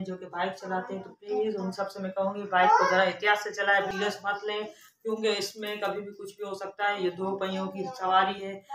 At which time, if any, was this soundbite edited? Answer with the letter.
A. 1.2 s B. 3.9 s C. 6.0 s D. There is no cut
B